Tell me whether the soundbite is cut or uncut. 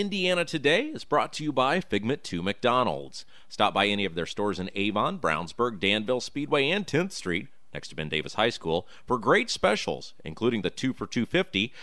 uncut